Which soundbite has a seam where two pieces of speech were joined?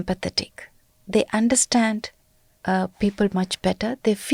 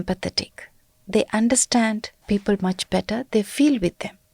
second; 1 cut; at 2.2 s

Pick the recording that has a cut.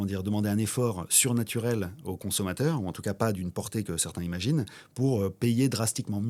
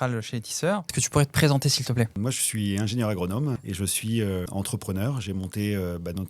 second; 4 cuts; at 1.0 s, 2.2 s, 3.6 s, 4.5 s

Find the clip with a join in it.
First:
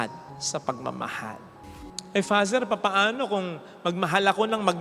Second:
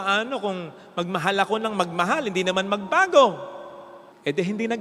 first; 1 cut; at 1.7 s

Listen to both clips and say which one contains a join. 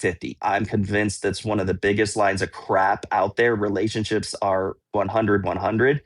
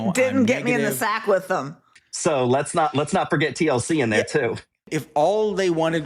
second; 2 cuts; at 1.8 s, 4.9 s

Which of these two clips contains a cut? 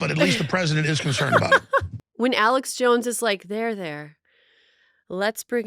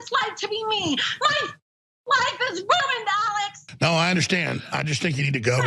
first; 1 cut; at 2.0 s

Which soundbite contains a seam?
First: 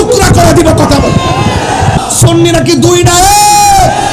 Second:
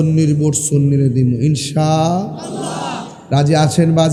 first; 1 cut; at 2.0 s

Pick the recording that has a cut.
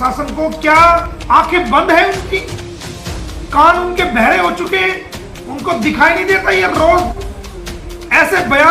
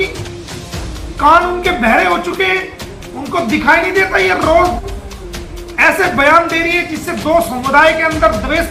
first; 1 cut; at 1.1 s

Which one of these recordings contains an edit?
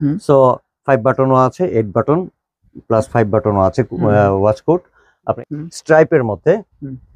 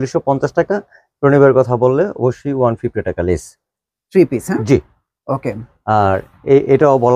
first; 1 cut; at 5.4 s

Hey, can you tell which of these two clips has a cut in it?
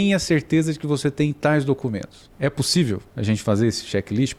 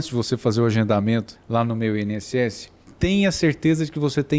second; 1 cut; at 1.4 s

